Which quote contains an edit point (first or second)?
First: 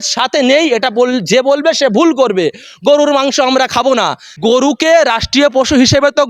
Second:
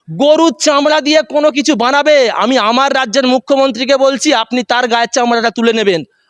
first